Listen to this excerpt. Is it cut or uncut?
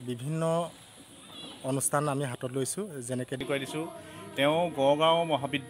cut